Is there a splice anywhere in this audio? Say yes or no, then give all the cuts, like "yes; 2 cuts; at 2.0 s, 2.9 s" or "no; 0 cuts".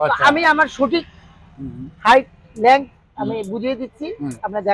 no; 0 cuts